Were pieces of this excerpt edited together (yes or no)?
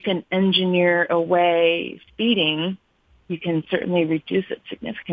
no